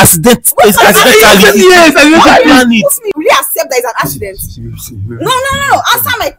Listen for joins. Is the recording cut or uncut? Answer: cut